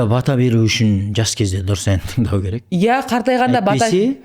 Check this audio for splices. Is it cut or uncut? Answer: uncut